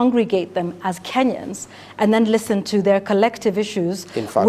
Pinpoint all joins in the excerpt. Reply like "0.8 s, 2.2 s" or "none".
none